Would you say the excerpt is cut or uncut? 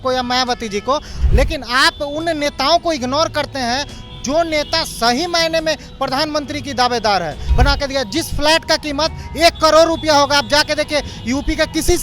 cut